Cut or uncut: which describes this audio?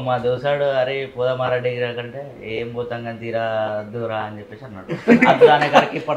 uncut